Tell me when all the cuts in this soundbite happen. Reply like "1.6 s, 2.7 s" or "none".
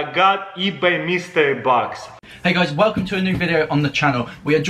2.1 s